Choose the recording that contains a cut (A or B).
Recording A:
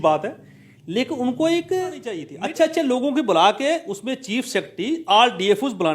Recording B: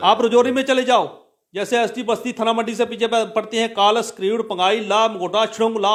A